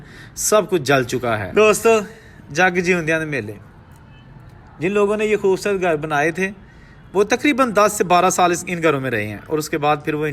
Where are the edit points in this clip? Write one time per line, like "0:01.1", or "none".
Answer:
0:01.4